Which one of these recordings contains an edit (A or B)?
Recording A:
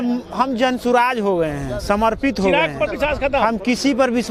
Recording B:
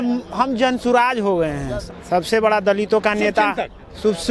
B